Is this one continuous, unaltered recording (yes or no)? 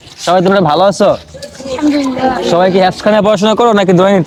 yes